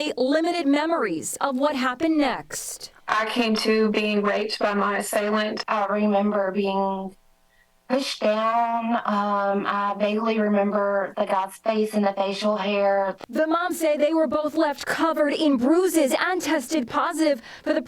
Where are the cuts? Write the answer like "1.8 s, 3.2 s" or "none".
5.9 s, 12.3 s